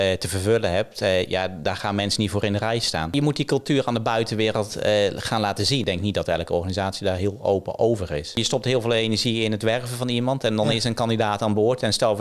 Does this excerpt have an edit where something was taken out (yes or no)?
yes